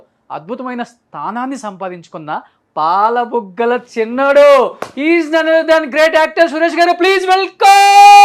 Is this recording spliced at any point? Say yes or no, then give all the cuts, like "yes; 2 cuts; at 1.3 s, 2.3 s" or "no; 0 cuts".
no; 0 cuts